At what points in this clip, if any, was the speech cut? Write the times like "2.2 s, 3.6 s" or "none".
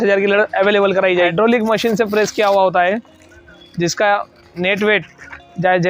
1.3 s, 3.6 s